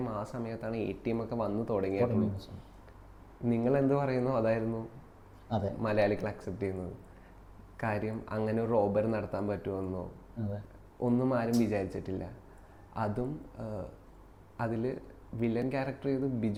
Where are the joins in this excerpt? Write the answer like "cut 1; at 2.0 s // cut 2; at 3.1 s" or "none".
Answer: none